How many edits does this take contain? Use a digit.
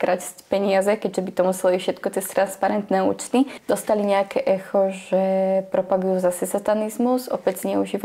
1